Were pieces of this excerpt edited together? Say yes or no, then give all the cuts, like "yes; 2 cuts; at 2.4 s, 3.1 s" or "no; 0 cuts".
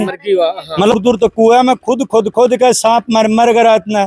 yes; 1 cut; at 0.9 s